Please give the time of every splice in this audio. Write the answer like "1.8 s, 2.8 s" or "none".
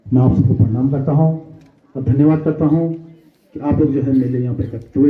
none